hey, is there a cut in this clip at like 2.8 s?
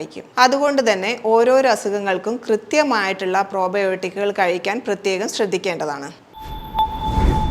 no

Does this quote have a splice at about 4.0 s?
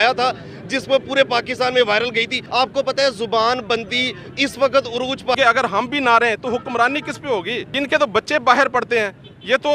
no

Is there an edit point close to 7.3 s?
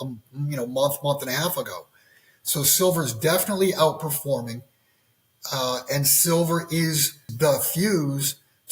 yes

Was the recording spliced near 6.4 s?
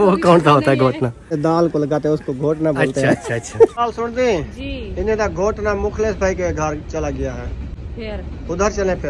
no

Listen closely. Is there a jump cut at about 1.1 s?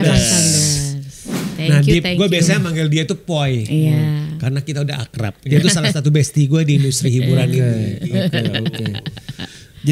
no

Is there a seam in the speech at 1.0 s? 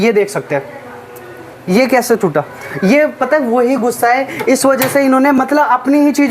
no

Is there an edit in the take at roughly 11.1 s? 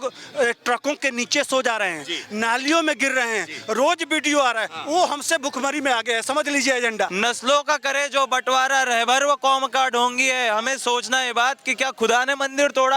no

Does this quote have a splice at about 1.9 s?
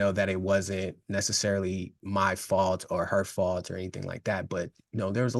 yes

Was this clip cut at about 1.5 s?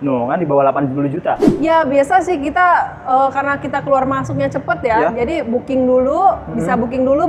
yes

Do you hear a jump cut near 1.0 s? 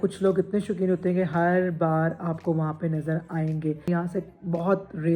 no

